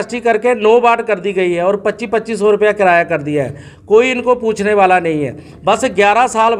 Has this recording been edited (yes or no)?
no